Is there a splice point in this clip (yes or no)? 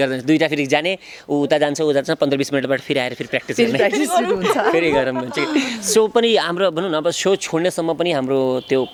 no